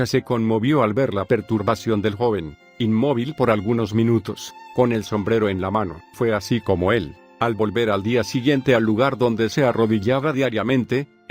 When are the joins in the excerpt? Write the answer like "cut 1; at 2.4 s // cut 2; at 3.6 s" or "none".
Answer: none